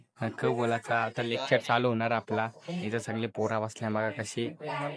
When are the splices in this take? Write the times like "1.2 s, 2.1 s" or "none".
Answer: none

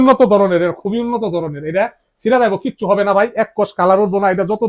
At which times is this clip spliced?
none

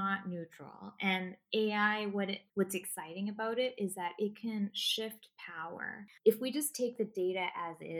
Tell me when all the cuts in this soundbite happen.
2.4 s, 6.0 s

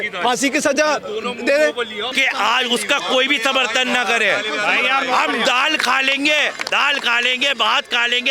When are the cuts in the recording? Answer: 2.1 s

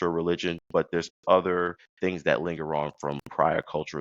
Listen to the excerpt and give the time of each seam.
1.8 s

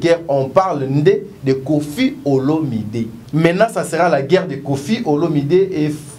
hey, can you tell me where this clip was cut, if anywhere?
3.2 s

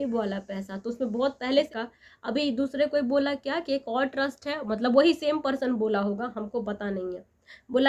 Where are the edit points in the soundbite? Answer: 1.7 s

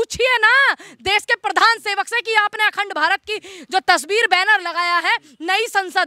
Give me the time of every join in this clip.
none

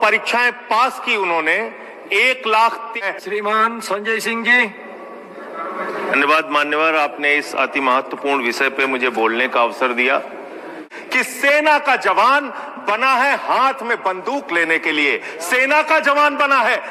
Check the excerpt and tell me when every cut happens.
2.9 s, 10.9 s

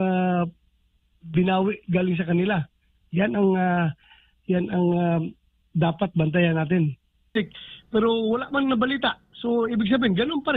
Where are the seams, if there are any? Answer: 7.4 s

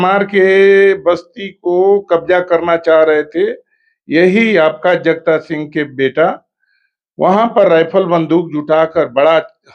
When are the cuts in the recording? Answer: none

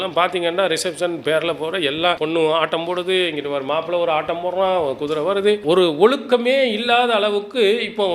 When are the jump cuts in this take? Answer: 5.6 s

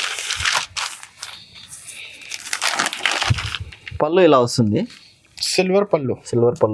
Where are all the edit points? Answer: none

